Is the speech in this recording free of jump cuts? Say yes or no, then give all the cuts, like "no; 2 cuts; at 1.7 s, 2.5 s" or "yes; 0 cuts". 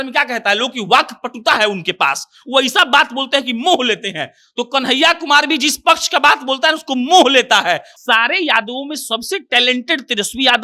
no; 1 cut; at 7.9 s